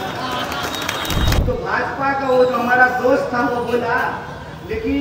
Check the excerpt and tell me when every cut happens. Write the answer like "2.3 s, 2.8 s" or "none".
1.3 s